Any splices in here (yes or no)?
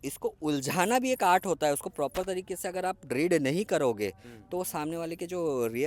no